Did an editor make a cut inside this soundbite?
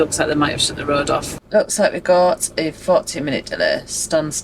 yes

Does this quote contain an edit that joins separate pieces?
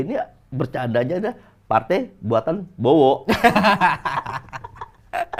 no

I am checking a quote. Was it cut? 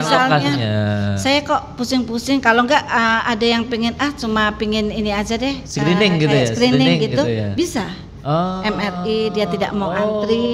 no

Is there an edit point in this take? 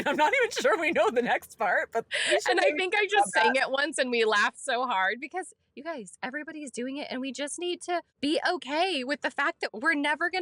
yes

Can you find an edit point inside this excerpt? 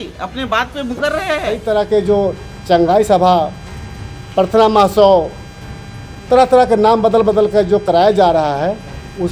yes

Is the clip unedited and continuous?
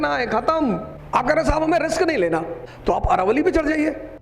no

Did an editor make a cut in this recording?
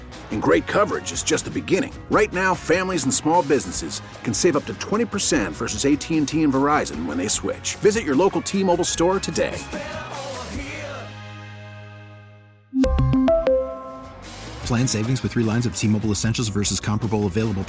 no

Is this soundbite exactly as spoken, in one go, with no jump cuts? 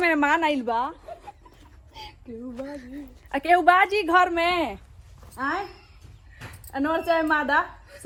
yes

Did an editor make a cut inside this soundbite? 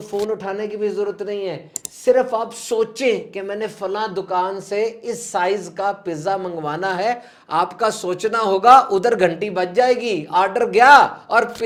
no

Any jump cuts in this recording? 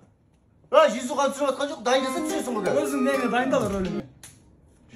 yes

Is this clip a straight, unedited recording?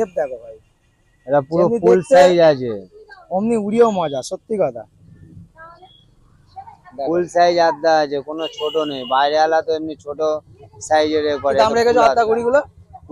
yes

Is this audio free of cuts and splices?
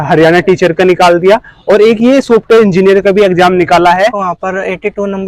no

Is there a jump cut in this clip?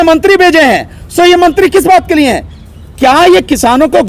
no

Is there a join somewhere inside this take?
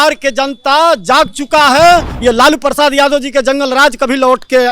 yes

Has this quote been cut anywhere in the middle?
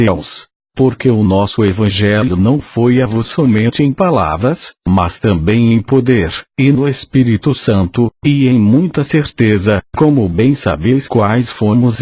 yes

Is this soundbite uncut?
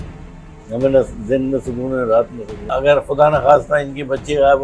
no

